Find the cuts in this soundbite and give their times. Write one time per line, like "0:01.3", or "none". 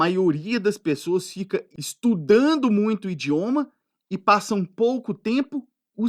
0:01.8